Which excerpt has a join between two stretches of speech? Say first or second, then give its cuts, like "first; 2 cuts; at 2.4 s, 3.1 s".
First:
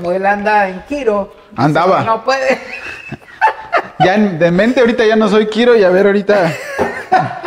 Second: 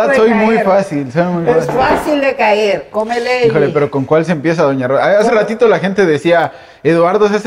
second; 1 cut; at 2.9 s